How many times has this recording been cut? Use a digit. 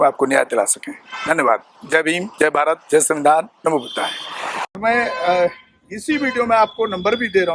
1